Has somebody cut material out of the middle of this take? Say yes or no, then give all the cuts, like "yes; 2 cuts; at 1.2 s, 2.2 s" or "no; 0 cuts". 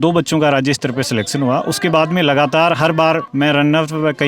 yes; 1 cut; at 3.3 s